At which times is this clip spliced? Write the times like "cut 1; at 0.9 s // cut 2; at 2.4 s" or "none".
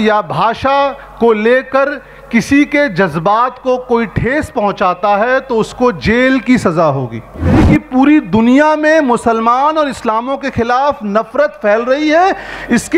cut 1; at 7.6 s